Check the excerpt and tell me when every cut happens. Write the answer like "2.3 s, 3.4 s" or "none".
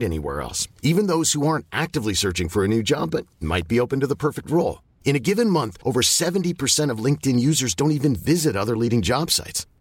none